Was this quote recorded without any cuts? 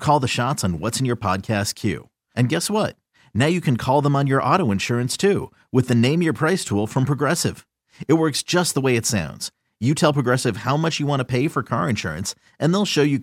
yes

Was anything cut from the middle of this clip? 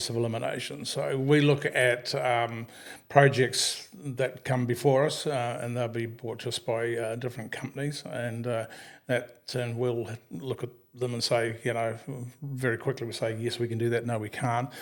no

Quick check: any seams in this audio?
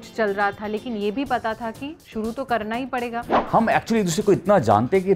yes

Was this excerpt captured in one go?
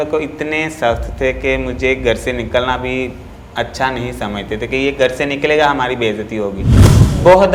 yes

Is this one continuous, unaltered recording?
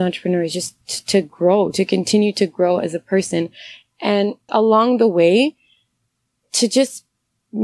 no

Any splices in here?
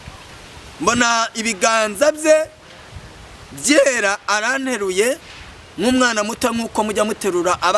no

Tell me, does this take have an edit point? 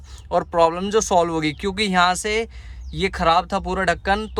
no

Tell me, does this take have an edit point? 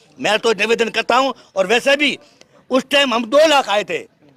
no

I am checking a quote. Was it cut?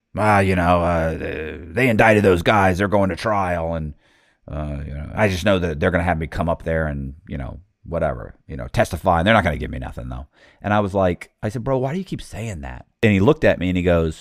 yes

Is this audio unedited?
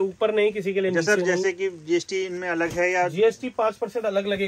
yes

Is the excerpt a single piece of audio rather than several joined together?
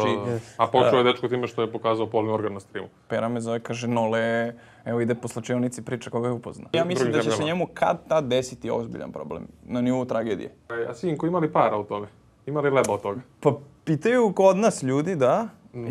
no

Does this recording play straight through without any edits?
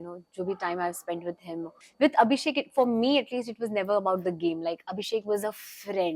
no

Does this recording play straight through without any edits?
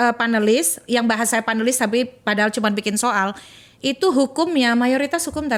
yes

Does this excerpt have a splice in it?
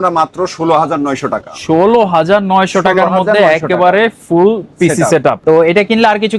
no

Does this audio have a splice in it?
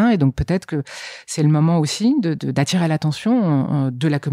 no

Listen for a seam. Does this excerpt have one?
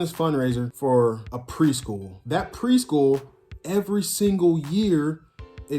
yes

